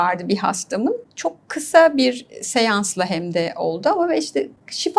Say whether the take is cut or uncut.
cut